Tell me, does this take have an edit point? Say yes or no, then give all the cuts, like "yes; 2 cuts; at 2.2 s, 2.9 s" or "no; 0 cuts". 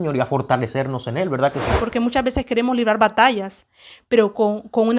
yes; 1 cut; at 1.8 s